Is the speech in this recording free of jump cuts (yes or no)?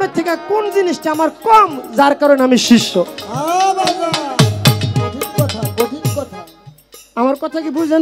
yes